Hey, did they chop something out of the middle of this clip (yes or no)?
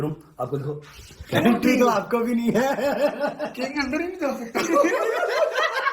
yes